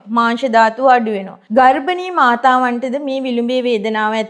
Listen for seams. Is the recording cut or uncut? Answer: cut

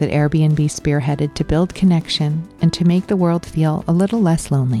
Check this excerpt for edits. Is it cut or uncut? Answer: uncut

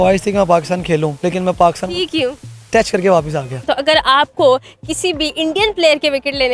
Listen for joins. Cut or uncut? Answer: cut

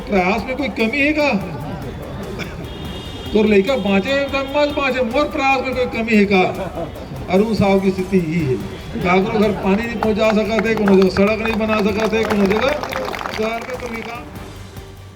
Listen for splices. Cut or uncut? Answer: cut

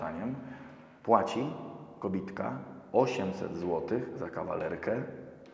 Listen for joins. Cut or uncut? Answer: uncut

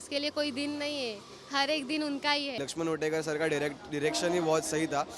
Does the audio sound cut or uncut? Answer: cut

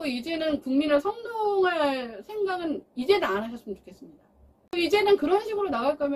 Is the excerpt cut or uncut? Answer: cut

